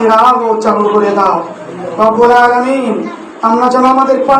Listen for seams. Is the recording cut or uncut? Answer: uncut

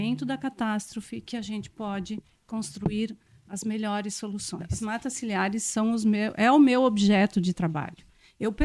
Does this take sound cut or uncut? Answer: cut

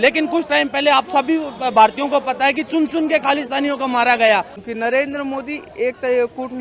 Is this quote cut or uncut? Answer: cut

